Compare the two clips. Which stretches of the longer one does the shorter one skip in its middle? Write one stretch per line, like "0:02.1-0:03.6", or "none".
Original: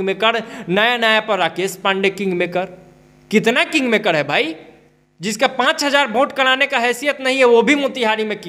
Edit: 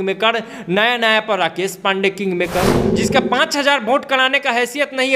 0:02.8-0:05.1

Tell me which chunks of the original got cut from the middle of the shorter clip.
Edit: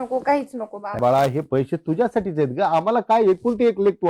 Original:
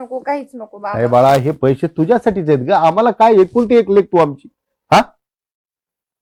0:01.0-0:01.1

